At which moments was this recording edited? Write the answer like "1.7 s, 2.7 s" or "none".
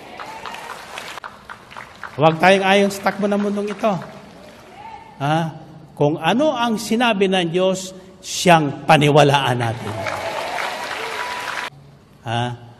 1.2 s, 11.7 s